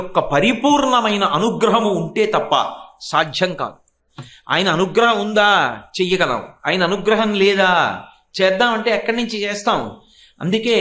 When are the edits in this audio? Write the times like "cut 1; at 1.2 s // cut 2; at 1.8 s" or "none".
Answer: none